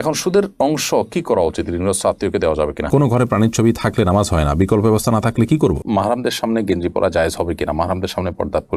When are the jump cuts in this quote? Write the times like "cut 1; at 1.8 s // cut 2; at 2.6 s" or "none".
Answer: cut 1; at 2.9 s // cut 2; at 5.8 s